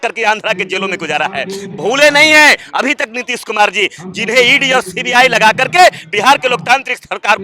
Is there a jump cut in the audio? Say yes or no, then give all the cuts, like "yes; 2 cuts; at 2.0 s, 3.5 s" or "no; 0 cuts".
no; 0 cuts